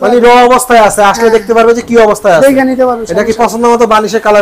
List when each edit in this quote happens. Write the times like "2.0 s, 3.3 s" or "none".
none